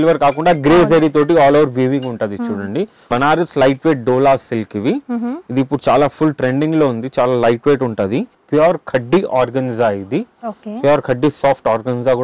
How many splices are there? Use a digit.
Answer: 2